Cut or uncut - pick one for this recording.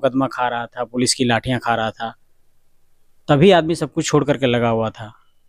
uncut